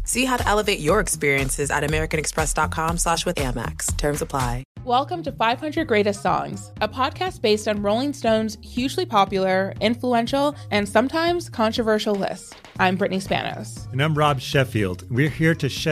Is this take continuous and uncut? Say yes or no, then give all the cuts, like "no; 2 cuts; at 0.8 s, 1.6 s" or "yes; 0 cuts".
no; 1 cut; at 4.7 s